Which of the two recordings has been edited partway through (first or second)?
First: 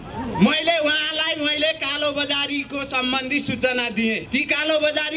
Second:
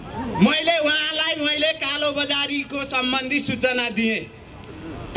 first